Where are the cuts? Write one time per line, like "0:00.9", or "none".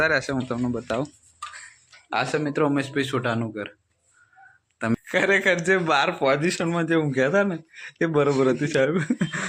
0:05.0